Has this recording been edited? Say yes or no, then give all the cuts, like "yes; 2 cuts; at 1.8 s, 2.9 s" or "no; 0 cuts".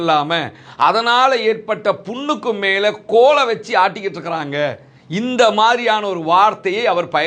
no; 0 cuts